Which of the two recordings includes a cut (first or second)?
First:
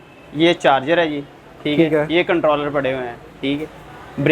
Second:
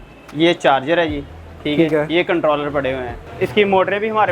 second